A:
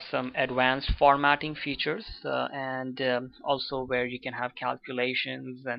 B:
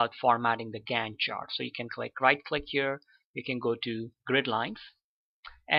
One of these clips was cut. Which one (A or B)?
A